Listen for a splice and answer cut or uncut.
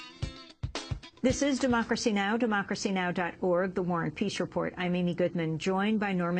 uncut